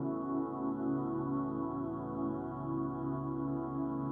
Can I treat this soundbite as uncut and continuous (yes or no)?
yes